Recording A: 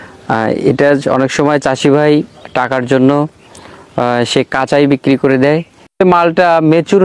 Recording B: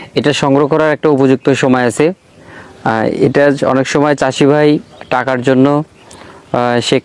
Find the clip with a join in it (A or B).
A